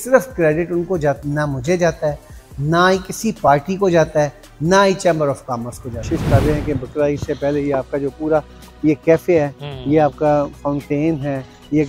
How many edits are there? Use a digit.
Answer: 2